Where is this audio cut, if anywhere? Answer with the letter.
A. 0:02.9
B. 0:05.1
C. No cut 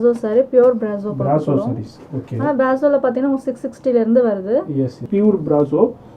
B